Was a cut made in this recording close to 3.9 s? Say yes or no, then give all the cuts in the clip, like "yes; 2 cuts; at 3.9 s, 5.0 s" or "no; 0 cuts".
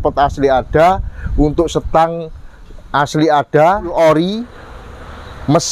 yes; 1 cut; at 3.9 s